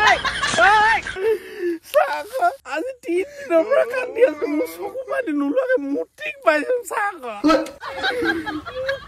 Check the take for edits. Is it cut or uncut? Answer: cut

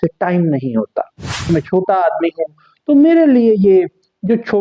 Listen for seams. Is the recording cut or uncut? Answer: cut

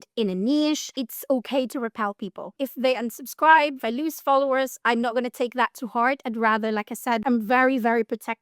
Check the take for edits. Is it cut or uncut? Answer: cut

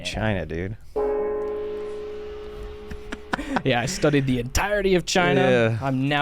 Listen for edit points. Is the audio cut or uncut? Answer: uncut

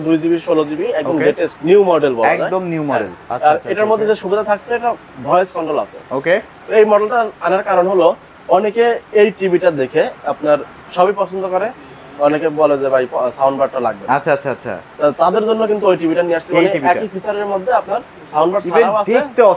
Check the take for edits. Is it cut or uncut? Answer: uncut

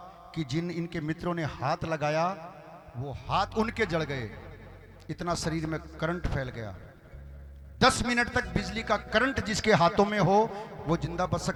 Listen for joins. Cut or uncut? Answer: uncut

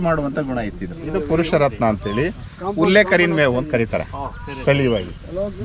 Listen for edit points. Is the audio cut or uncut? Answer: cut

